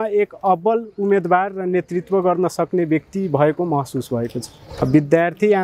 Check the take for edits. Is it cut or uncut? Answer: uncut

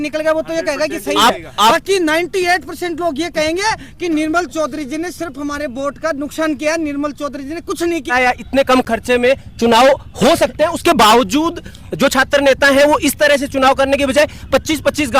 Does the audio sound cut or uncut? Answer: cut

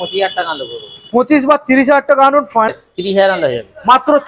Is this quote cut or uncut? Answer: cut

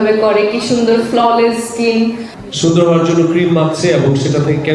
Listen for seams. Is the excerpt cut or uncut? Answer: cut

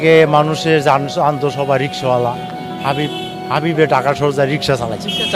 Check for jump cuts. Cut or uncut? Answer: uncut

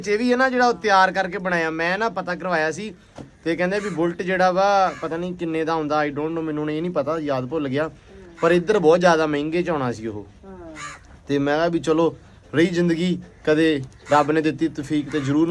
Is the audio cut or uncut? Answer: uncut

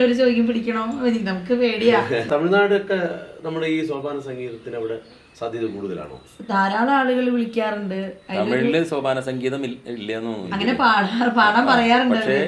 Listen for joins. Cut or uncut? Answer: cut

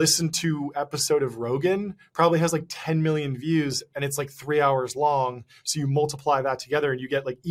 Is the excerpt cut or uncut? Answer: uncut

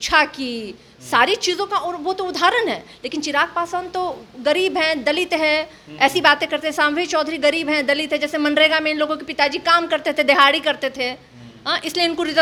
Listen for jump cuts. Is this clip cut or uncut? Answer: uncut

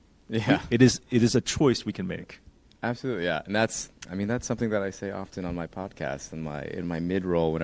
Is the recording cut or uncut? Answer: uncut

